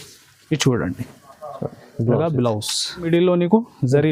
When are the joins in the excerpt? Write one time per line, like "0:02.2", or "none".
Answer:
0:03.1

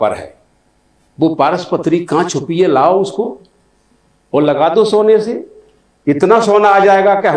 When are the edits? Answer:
none

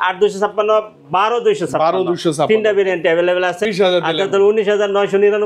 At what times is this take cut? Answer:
0:03.6

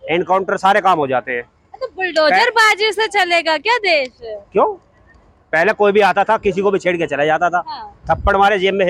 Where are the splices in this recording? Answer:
none

